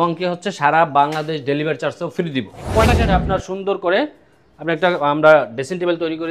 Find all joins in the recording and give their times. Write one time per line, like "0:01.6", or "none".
0:03.0

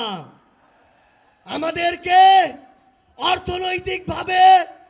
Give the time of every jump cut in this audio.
0:01.7

